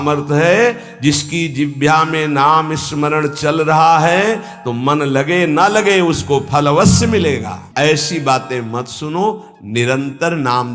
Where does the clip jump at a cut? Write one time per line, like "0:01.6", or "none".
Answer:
0:07.8